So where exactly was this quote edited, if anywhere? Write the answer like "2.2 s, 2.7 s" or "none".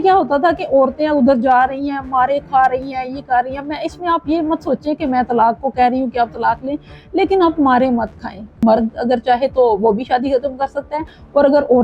8.6 s